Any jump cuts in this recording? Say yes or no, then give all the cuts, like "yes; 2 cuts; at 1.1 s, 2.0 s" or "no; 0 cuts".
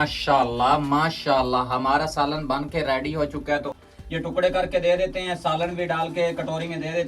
yes; 1 cut; at 3.7 s